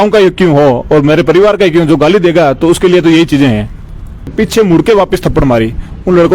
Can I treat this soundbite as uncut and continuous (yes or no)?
no